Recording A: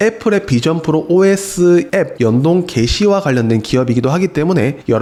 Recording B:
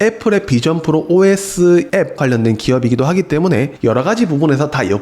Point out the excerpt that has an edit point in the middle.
B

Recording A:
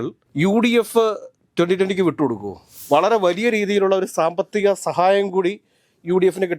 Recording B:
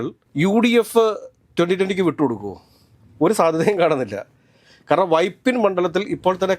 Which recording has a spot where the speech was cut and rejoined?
A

